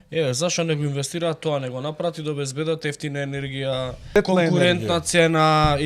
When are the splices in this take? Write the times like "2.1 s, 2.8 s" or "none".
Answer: 4.2 s